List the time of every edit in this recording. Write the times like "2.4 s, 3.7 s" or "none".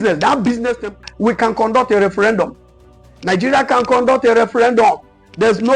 1.0 s